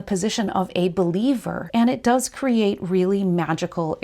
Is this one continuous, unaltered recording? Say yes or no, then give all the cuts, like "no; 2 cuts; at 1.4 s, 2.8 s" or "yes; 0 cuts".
no; 1 cut; at 1.6 s